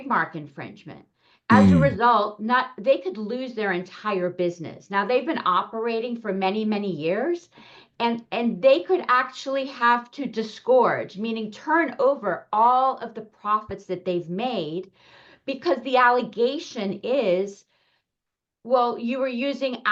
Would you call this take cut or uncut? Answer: uncut